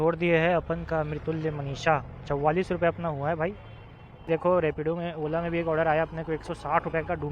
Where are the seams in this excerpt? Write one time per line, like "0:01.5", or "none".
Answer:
0:04.3